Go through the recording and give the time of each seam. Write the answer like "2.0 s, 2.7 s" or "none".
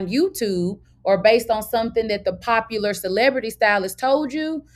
none